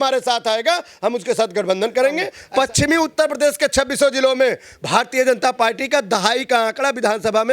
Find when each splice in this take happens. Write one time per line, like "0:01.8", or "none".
0:02.4